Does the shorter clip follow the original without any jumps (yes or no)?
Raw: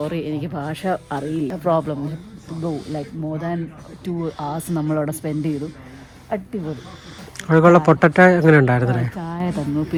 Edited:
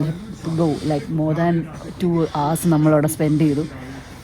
yes